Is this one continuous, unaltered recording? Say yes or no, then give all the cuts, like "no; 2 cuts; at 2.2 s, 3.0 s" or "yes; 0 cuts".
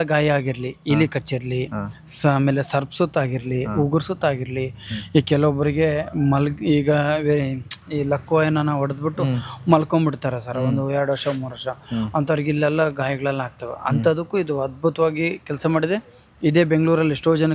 yes; 0 cuts